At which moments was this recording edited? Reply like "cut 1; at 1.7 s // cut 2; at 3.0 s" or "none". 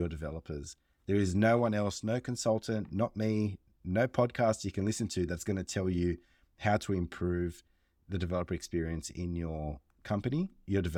none